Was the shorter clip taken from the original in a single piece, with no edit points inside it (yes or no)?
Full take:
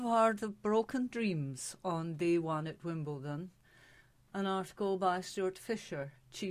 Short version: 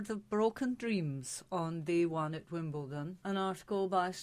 no